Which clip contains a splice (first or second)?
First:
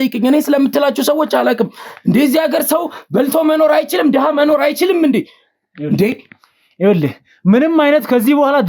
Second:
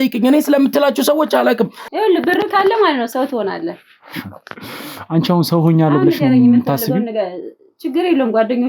second